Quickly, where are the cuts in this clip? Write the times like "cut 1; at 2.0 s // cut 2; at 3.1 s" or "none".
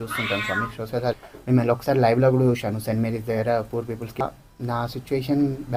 cut 1; at 1.3 s // cut 2; at 4.2 s